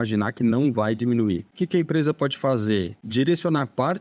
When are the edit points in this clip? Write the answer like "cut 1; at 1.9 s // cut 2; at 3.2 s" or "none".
cut 1; at 1.5 s // cut 2; at 3.0 s